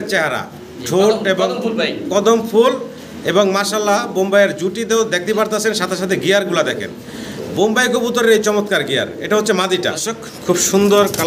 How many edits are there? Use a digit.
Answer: 1